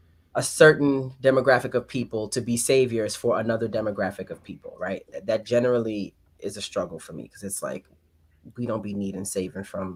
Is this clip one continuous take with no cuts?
yes; 0 cuts

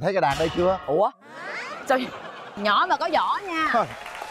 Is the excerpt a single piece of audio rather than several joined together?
yes; 0 cuts

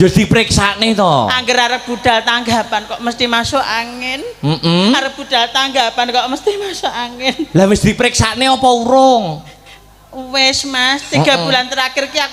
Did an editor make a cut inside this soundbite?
no; 0 cuts

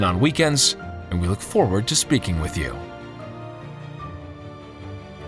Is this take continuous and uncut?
no; 1 cut; at 2.7 s

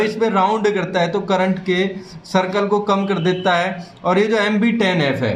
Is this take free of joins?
yes; 0 cuts

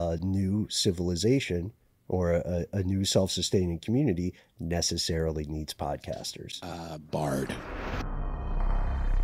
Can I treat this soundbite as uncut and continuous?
no; 1 cut; at 8.0 s

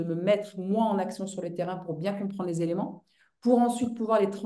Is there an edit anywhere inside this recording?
no; 0 cuts

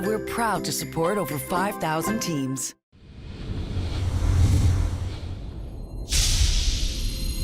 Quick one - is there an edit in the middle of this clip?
yes; 1 cut; at 2.7 s

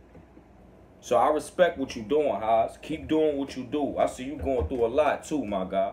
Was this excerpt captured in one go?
yes; 0 cuts

